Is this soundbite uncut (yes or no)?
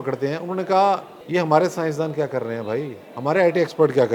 no